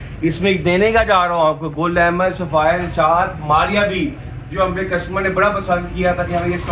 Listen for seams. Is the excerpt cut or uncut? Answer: uncut